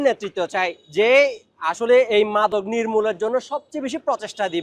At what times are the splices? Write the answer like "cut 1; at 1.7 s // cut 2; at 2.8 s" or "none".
none